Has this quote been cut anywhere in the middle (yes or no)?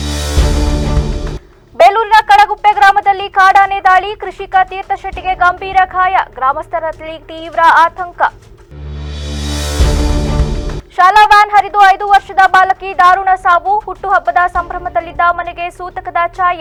no